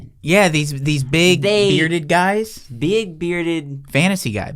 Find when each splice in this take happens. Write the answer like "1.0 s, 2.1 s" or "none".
none